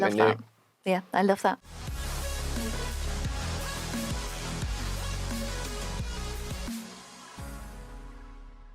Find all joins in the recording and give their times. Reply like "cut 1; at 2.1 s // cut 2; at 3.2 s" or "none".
cut 1; at 1.6 s